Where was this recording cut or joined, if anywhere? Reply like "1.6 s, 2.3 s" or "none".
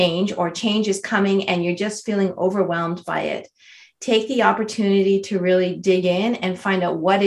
none